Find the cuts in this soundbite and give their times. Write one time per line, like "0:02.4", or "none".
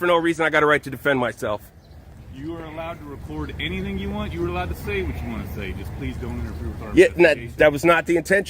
0:02.2